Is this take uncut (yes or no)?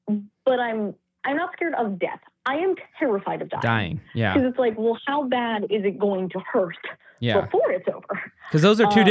yes